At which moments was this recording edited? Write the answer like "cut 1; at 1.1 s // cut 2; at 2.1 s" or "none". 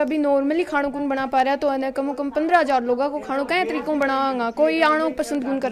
none